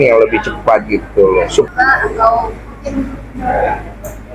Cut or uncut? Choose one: cut